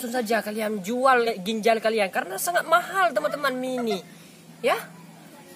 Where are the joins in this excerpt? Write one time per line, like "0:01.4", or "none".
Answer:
none